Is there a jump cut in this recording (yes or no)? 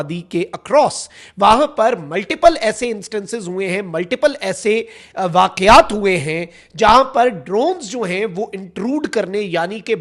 no